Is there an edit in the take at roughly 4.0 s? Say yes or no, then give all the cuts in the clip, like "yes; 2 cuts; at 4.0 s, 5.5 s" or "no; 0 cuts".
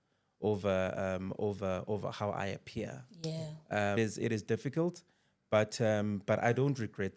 yes; 1 cut; at 4.0 s